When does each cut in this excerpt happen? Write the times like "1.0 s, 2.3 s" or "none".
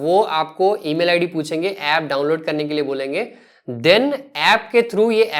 none